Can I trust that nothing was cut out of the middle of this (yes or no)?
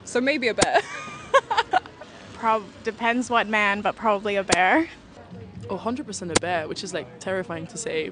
yes